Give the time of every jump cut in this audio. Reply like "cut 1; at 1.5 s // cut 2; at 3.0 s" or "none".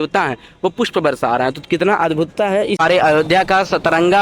cut 1; at 2.8 s